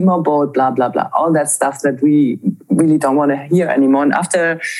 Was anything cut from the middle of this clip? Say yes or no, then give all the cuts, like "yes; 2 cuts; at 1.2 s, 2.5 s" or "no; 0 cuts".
no; 0 cuts